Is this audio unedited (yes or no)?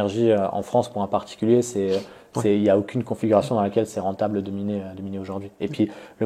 yes